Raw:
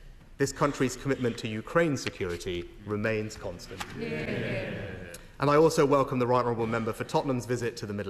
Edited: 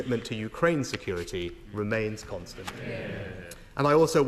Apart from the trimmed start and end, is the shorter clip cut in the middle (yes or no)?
yes